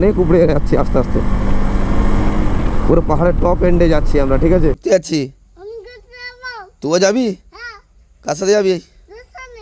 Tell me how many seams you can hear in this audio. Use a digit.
1